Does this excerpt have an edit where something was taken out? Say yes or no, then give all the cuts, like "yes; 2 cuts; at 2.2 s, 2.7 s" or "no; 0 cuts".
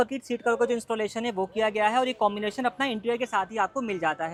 no; 0 cuts